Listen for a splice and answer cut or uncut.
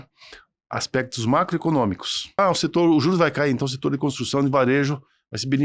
cut